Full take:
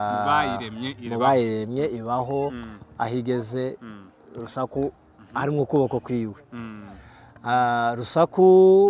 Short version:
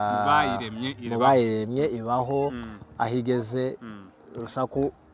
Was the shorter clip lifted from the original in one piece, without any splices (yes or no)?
yes